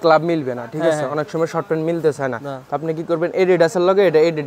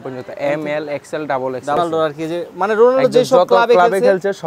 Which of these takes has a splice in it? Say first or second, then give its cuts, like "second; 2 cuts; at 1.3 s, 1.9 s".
second; 1 cut; at 1.8 s